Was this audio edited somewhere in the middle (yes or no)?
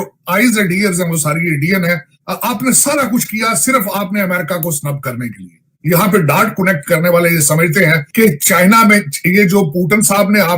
yes